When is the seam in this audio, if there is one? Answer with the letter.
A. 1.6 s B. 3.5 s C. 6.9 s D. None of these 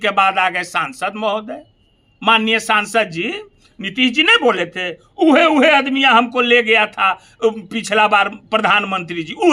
D